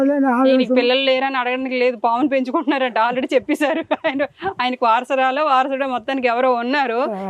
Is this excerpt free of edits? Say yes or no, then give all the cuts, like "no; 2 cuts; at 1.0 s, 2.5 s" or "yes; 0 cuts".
yes; 0 cuts